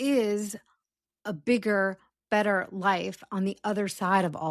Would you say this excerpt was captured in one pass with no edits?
yes; 0 cuts

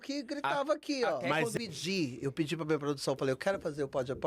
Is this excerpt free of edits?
no; 1 cut; at 1.5 s

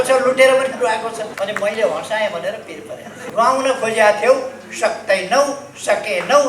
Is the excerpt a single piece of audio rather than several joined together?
no; 2 cuts; at 1.3 s, 3.2 s

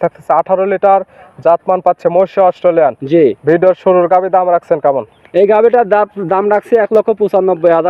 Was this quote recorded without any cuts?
yes; 0 cuts

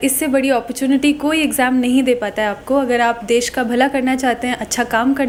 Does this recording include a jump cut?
no; 0 cuts

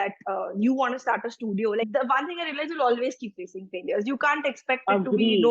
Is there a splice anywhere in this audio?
yes; 1 cut; at 1.9 s

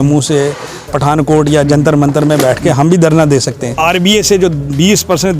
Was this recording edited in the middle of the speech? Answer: yes; 1 cut; at 3.8 s

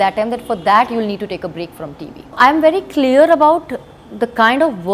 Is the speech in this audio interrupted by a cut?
yes; 2 cuts; at 2.3 s, 4.0 s

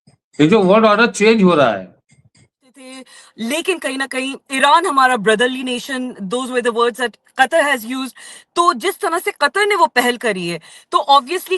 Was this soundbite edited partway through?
yes; 1 cut; at 3.0 s

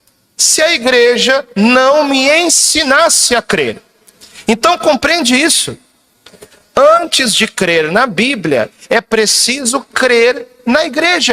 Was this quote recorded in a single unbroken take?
no; 1 cut; at 6.4 s

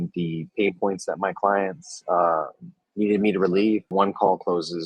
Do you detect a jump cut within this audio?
yes; 1 cut; at 3.9 s

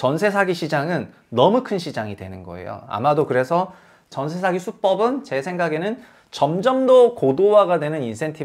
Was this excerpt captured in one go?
yes; 0 cuts

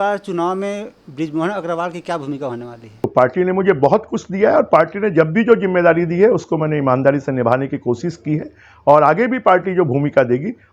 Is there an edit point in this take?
yes; 1 cut; at 3.1 s

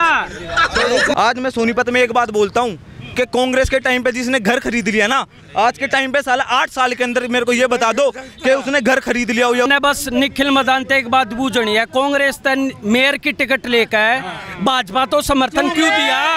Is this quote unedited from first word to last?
no; 2 cuts; at 1.1 s, 9.7 s

